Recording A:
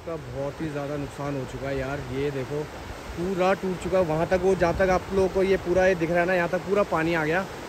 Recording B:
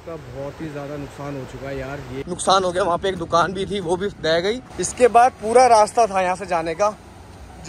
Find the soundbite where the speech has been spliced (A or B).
B